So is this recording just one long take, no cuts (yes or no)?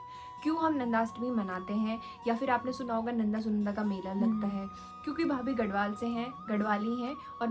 no